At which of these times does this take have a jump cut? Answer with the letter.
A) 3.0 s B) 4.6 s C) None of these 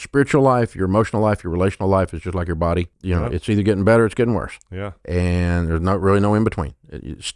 A